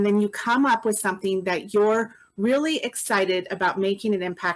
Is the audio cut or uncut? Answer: uncut